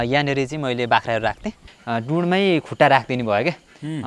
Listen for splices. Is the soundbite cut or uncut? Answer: cut